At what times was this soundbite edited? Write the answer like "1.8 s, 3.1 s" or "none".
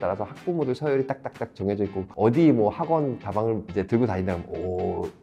2.0 s